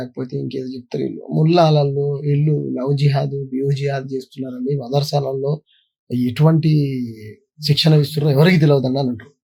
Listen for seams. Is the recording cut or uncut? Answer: uncut